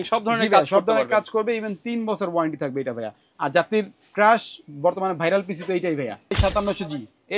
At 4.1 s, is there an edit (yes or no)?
no